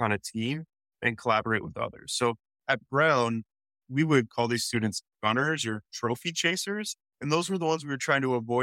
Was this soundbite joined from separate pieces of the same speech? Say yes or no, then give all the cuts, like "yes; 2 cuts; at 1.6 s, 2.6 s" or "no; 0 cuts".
no; 0 cuts